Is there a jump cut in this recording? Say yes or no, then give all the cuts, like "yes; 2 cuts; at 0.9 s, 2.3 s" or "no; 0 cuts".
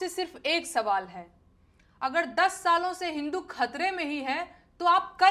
no; 0 cuts